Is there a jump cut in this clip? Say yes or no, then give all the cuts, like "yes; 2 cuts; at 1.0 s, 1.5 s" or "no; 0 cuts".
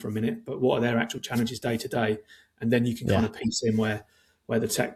no; 0 cuts